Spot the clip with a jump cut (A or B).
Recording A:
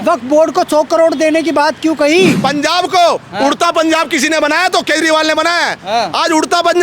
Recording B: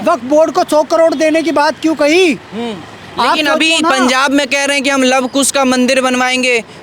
A